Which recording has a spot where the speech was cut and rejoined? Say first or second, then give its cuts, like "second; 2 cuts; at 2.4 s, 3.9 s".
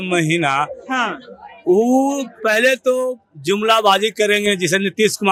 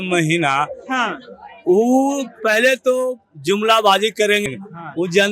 second; 1 cut; at 4.4 s